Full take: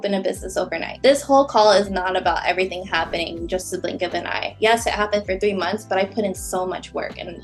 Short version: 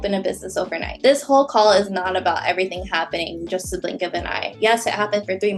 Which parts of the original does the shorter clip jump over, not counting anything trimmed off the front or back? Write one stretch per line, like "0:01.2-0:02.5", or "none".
none